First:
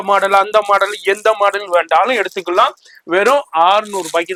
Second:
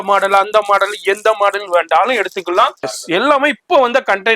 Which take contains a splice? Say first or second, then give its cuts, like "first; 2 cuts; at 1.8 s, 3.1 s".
second; 1 cut; at 2.9 s